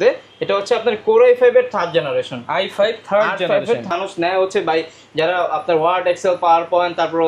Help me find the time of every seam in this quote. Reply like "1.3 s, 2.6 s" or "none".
3.9 s